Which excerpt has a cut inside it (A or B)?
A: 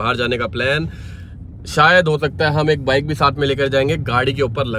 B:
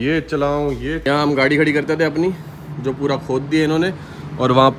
B